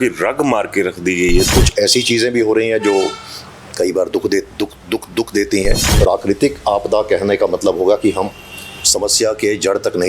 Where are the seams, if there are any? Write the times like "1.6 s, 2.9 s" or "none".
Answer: 1.5 s, 5.8 s